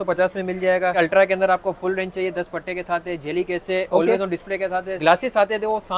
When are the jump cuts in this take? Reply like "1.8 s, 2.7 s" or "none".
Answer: 1.0 s, 4.9 s